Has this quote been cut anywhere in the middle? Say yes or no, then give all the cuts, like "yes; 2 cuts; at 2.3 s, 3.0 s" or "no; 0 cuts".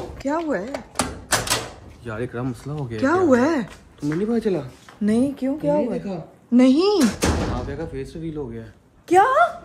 no; 0 cuts